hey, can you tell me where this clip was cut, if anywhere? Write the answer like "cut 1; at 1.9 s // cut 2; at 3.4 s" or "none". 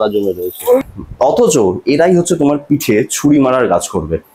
cut 1; at 0.9 s